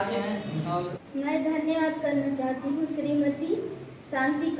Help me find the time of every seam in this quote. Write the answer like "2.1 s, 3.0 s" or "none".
1.0 s